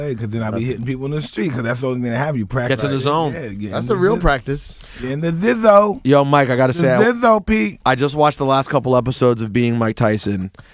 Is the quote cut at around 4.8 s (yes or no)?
no